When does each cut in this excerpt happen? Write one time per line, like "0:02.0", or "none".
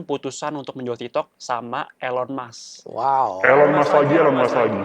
none